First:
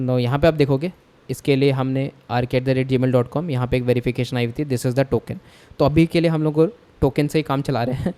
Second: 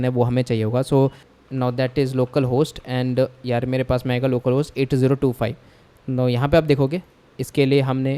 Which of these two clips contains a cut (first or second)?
second